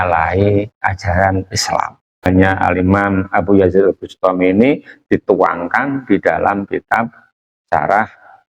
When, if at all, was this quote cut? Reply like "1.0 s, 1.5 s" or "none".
2.3 s